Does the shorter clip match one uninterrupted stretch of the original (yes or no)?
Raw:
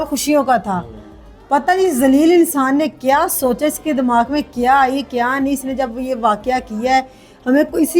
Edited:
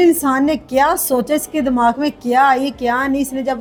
yes